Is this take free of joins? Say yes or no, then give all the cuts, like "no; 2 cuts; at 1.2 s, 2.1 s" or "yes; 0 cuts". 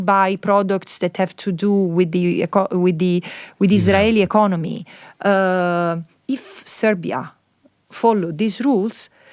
yes; 0 cuts